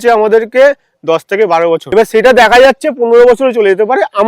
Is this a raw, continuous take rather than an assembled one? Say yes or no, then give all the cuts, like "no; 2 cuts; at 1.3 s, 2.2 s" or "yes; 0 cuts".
no; 1 cut; at 1.8 s